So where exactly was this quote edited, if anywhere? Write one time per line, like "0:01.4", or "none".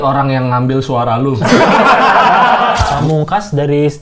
0:02.8